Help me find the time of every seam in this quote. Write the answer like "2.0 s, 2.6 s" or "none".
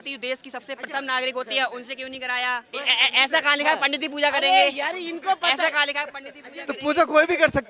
2.7 s